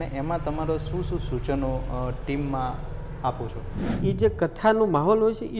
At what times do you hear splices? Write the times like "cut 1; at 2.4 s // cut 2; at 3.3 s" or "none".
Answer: cut 1; at 3.9 s